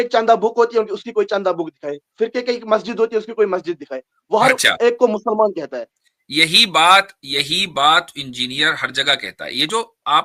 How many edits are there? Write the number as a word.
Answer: zero